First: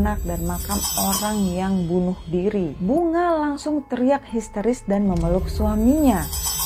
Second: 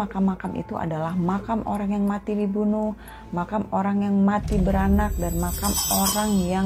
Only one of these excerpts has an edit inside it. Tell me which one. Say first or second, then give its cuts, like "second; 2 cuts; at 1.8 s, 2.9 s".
first; 1 cut; at 2.8 s